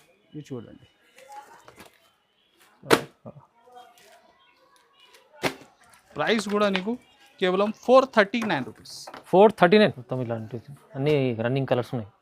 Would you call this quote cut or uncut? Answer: cut